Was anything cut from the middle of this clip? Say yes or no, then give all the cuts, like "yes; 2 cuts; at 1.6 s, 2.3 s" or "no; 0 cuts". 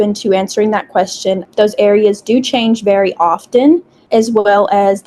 no; 0 cuts